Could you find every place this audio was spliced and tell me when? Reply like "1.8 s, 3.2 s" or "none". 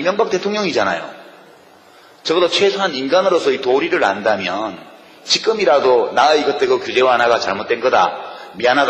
none